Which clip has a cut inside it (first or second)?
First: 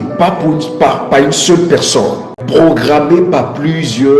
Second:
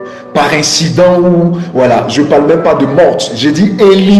first